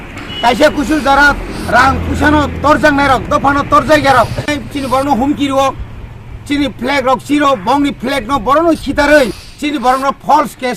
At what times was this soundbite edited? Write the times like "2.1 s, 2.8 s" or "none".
4.6 s, 9.5 s